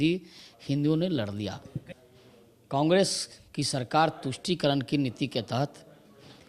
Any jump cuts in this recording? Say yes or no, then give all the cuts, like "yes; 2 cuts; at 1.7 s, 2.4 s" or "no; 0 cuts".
yes; 1 cut; at 1.9 s